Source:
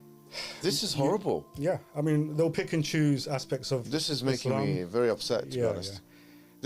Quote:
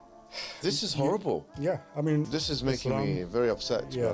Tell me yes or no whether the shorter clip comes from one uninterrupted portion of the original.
no